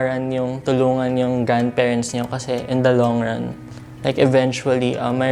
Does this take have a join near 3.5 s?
no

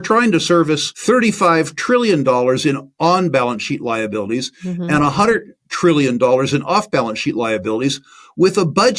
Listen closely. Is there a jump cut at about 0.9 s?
yes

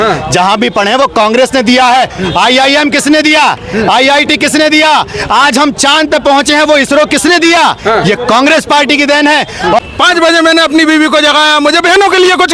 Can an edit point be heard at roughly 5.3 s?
no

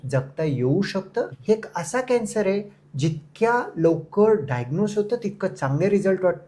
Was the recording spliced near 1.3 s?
yes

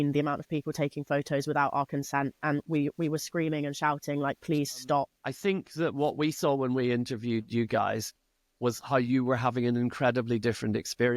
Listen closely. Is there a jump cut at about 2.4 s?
no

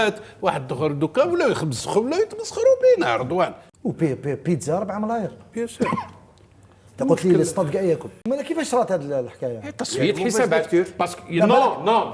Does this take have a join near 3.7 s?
yes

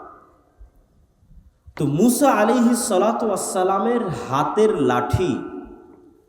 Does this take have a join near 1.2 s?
yes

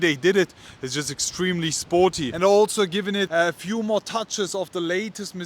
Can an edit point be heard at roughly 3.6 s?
no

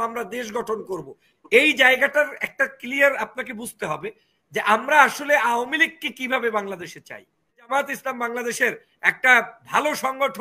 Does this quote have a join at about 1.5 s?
no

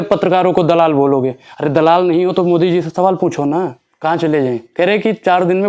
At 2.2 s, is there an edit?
no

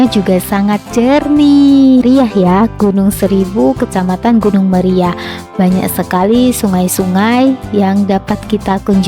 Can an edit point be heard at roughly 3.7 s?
no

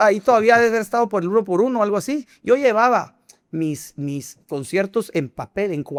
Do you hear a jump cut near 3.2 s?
no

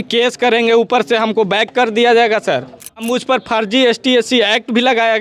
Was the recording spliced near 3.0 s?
yes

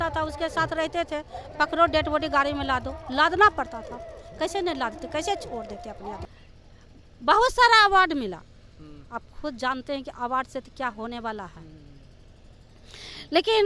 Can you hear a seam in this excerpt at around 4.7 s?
no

